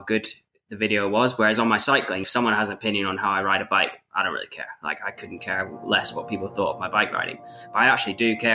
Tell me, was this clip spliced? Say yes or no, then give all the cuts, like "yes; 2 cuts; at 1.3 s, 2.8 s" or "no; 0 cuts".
yes; 1 cut; at 2.2 s